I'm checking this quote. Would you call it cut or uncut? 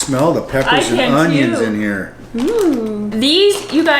cut